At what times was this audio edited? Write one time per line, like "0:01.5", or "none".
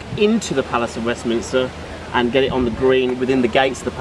0:01.4

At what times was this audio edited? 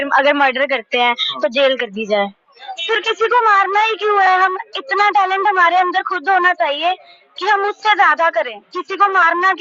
0:02.6

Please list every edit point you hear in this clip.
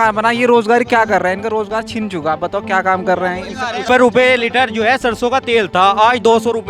0:03.8

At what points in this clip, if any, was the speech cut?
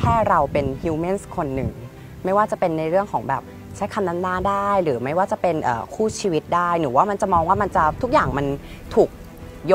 none

